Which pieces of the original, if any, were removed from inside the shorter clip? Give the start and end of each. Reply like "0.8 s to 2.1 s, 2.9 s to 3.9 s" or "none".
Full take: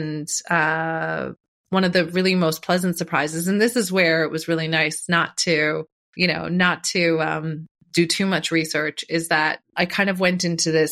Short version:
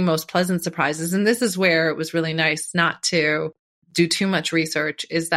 6.0 s to 7.7 s